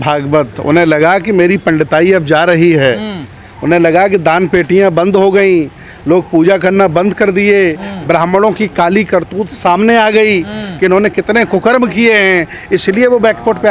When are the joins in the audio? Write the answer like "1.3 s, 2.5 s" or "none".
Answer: none